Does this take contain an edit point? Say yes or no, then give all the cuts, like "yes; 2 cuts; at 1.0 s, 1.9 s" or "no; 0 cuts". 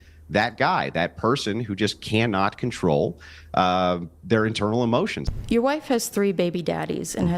yes; 1 cut; at 5.2 s